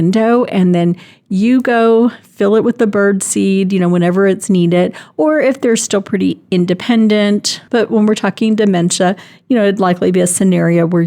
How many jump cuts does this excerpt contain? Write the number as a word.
one